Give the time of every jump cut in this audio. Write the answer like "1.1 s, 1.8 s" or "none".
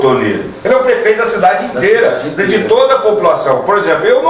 none